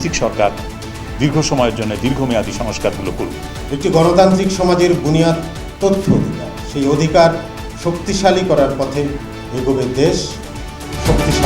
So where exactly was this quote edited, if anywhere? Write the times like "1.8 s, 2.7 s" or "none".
3.6 s